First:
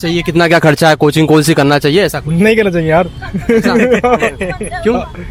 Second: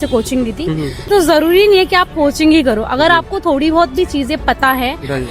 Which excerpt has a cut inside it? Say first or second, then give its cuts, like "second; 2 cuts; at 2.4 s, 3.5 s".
second; 1 cut; at 1.0 s